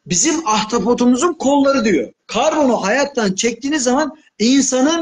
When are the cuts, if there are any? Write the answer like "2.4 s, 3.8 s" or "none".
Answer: 2.2 s